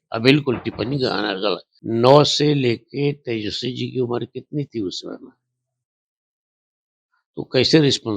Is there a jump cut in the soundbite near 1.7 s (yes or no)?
yes